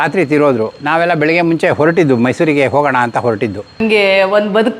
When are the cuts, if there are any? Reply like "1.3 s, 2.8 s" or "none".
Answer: 3.8 s

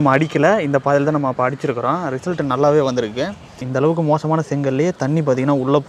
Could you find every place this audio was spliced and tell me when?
3.6 s

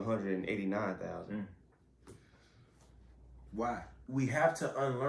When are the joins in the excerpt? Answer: 4.0 s

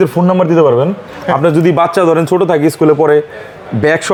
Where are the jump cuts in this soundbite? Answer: none

